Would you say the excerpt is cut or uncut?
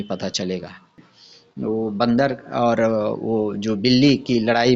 cut